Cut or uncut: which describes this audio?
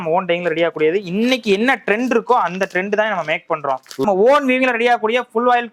cut